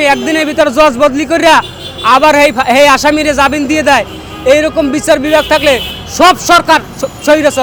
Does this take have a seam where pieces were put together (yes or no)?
no